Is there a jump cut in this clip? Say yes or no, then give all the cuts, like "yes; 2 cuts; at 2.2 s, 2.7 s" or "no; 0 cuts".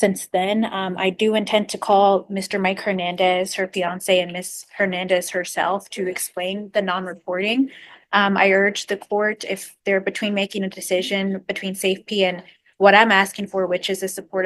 no; 0 cuts